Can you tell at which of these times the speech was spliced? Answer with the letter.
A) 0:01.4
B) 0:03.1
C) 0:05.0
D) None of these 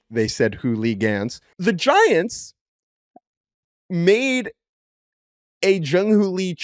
A